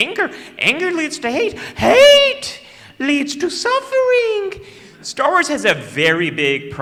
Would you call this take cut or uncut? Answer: uncut